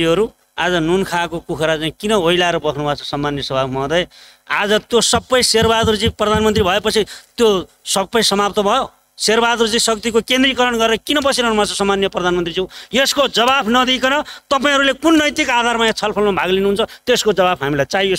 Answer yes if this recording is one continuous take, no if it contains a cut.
yes